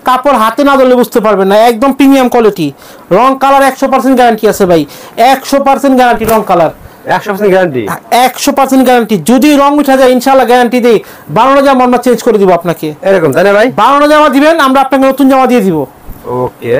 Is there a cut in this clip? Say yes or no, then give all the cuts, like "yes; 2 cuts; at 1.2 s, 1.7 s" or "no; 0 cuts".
no; 0 cuts